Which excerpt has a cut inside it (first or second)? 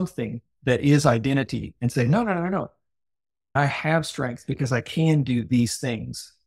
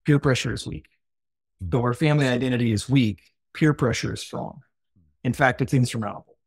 first